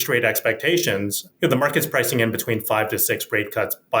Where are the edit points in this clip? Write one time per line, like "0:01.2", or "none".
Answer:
0:01.2